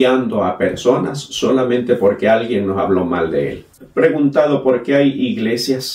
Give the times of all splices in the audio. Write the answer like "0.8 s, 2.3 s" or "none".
3.7 s